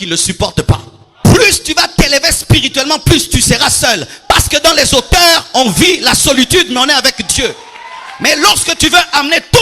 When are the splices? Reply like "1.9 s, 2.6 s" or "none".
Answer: 1.0 s